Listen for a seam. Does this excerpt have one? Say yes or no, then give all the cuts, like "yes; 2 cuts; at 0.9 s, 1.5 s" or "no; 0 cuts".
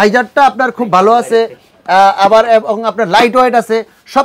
no; 0 cuts